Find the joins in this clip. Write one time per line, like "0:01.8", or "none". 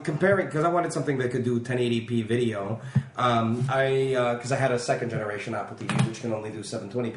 0:04.6